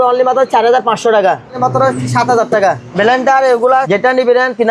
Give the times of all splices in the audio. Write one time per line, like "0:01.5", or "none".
0:01.6
0:02.9
0:03.9